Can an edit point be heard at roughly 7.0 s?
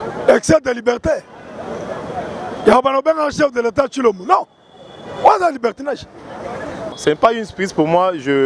yes; 1 cut; at 7.0 s

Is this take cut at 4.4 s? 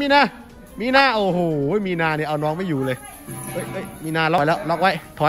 yes; 1 cut; at 4.4 s

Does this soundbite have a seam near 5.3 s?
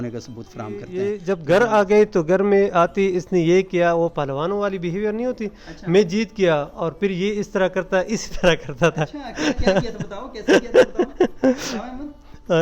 no; 1 cut; at 0.9 s

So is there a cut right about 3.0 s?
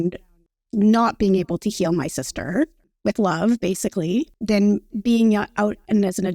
no; 1 cut; at 4.3 s

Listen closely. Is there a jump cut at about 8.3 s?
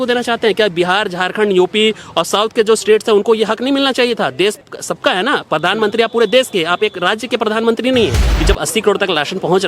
yes; 2 cuts; at 4.6 s, 8.3 s

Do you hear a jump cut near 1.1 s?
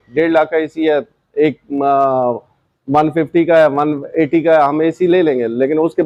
no; 0 cuts

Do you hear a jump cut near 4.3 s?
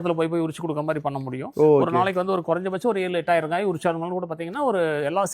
no; 1 cut; at 1.4 s

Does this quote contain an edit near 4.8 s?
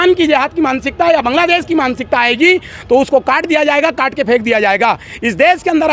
no; 0 cuts

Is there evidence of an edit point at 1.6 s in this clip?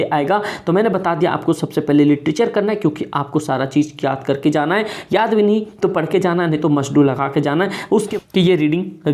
no; 1 cut; at 8.0 s

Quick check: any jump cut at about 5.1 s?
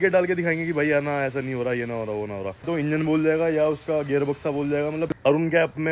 yes; 2 cuts; at 2.7 s, 5.1 s

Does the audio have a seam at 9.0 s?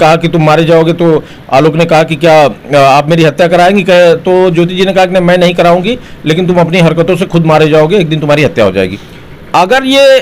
yes; 1 cut; at 9.0 s

